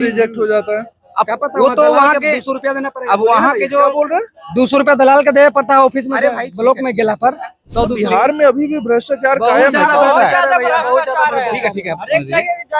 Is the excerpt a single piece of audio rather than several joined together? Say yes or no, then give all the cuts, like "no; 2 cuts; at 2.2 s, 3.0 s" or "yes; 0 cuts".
yes; 0 cuts